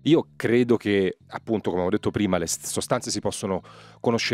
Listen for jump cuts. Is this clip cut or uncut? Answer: cut